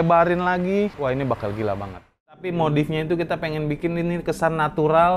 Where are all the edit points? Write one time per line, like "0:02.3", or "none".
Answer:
0:02.5